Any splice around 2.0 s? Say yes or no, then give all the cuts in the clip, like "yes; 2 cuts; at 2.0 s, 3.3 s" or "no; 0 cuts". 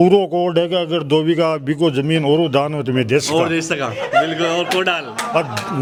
no; 0 cuts